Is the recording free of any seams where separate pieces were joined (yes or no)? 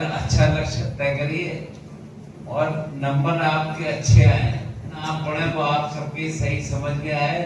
no